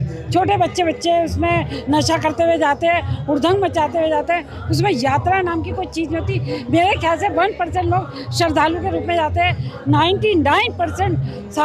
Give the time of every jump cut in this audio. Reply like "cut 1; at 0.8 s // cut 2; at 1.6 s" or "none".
none